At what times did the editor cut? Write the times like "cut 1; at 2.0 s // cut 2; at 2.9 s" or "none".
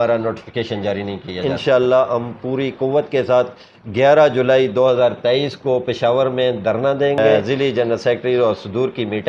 cut 1; at 1.4 s // cut 2; at 7.3 s